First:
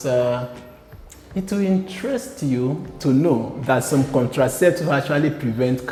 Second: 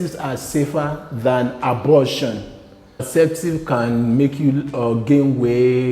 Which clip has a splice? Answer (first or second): second